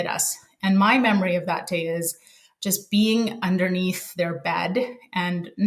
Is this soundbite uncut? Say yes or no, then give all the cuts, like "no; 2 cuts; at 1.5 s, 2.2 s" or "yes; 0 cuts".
yes; 0 cuts